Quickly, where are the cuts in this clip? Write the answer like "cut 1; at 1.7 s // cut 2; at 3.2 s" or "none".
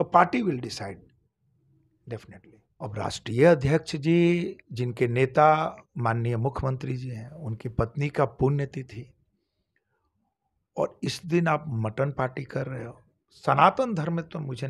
cut 1; at 2.6 s